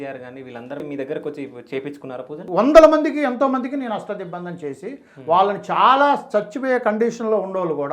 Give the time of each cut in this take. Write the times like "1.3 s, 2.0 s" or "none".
0.8 s, 2.4 s